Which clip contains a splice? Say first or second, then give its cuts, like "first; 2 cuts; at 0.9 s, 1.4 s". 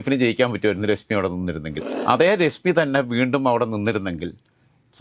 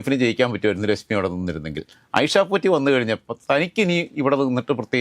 first; 1 cut; at 1.9 s